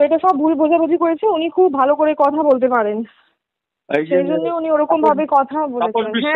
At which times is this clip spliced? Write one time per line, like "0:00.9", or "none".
none